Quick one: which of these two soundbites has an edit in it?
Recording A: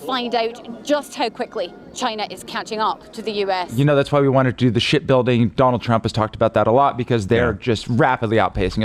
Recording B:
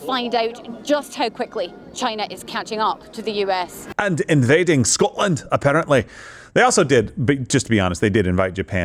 A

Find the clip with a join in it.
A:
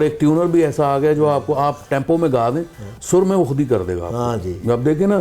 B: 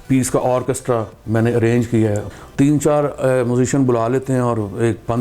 B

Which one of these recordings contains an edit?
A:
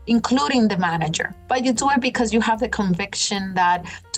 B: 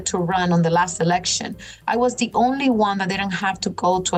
A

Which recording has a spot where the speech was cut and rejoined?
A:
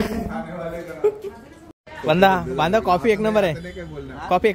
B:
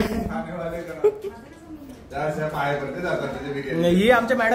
A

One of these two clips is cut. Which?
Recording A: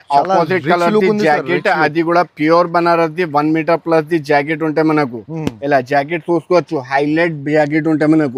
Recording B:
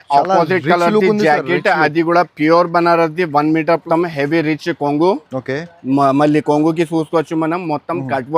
B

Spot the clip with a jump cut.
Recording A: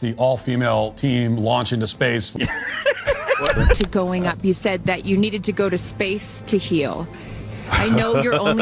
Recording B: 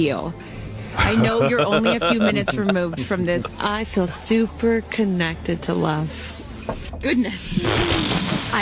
A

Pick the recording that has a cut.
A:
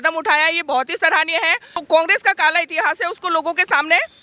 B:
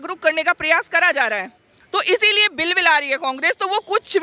A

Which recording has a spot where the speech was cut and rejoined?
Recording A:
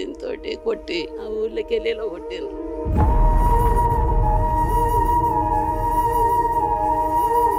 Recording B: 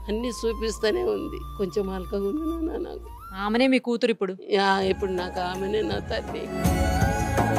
A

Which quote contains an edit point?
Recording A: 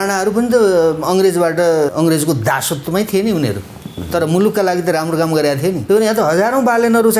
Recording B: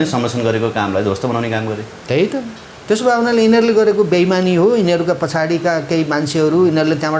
A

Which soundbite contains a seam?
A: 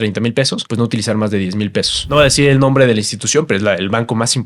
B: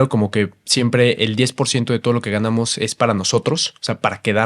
A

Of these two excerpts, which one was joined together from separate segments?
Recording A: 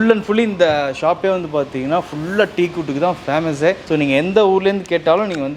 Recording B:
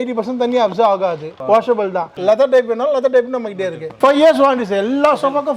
B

